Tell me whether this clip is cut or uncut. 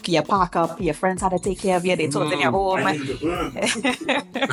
uncut